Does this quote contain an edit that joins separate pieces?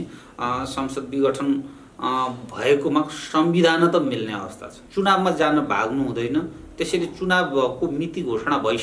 yes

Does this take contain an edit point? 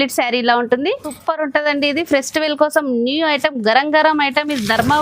yes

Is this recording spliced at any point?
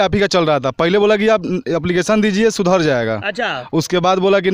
no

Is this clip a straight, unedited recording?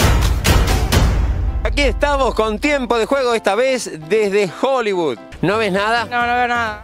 no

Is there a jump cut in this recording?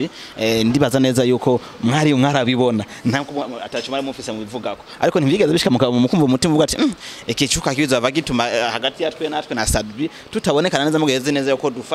no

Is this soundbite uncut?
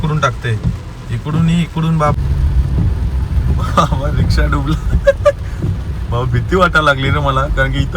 no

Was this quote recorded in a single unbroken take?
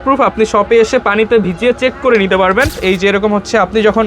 no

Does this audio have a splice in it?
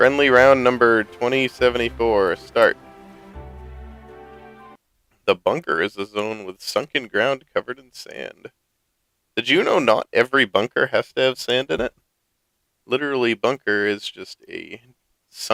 no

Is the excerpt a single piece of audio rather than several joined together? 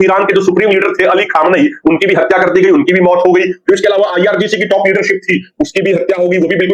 yes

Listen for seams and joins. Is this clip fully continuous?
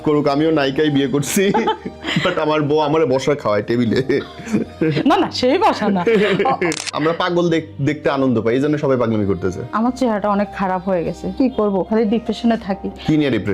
no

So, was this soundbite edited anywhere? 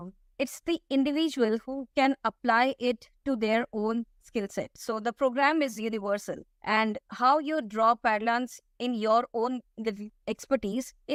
no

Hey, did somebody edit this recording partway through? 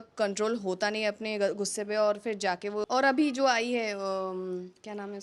yes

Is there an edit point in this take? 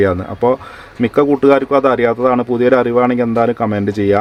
no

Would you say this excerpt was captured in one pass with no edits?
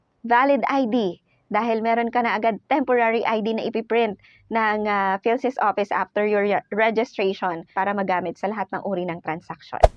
no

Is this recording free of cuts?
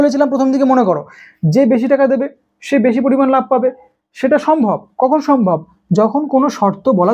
yes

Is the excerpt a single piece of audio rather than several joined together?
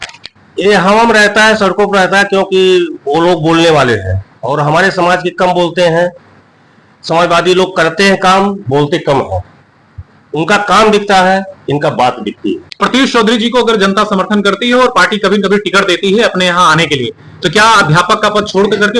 no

